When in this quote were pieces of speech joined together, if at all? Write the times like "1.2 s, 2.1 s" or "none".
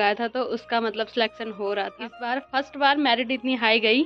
2.0 s